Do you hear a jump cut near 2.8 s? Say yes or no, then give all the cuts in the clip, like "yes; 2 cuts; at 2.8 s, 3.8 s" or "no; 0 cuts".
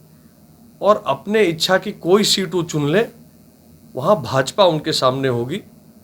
no; 0 cuts